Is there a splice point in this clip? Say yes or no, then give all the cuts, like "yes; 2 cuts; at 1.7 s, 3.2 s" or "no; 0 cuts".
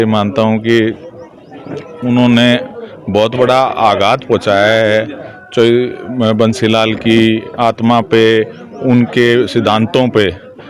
no; 0 cuts